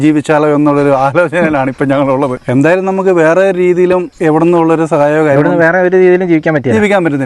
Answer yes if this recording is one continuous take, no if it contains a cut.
no